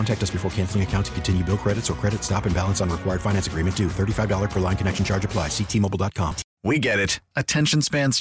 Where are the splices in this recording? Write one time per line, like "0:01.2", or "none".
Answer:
0:06.5